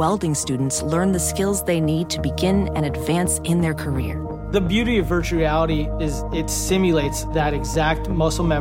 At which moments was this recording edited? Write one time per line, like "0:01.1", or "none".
none